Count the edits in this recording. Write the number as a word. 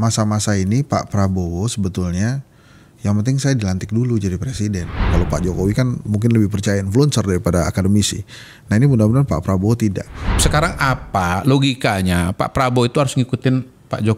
two